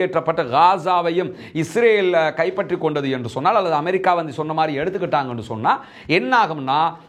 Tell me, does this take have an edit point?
no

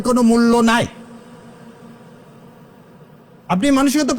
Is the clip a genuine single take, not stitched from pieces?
yes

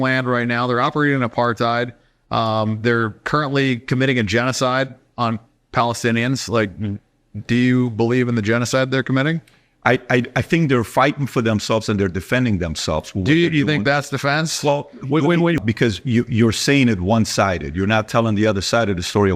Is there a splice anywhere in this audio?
yes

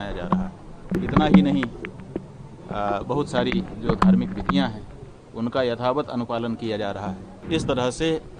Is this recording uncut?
no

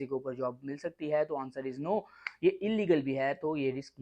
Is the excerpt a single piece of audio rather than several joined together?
yes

